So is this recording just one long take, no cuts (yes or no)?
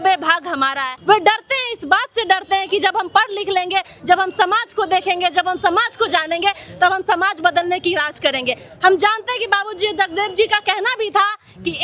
no